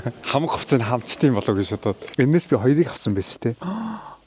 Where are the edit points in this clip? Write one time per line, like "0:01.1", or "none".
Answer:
0:02.0

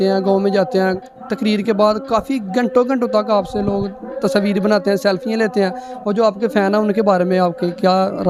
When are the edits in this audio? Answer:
none

